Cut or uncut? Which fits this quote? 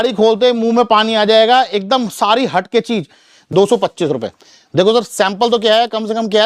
cut